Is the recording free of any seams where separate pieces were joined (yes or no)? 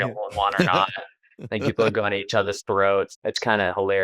no